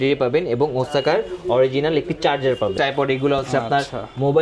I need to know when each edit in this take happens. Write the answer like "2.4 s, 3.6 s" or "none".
2.7 s